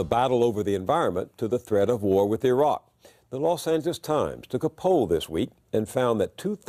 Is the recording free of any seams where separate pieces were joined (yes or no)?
yes